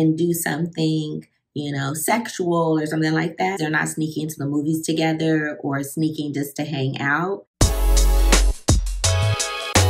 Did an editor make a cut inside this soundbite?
yes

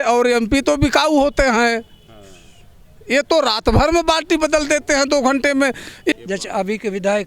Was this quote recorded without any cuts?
no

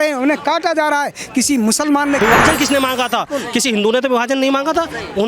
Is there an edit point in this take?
yes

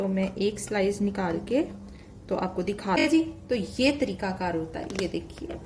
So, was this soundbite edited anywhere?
yes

